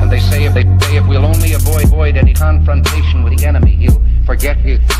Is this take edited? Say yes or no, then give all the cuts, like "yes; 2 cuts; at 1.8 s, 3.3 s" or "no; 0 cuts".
no; 0 cuts